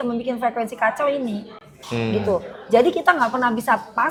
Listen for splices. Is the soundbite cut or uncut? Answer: uncut